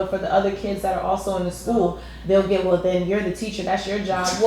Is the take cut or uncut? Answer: cut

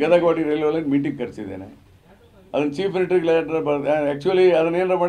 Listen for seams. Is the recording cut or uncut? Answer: uncut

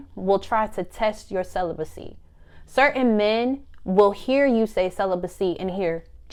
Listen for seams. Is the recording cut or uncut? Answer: uncut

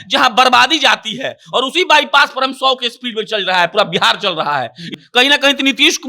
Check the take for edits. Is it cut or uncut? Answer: cut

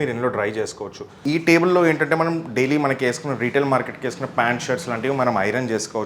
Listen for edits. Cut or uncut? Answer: cut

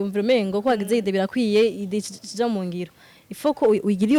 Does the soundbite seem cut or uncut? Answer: uncut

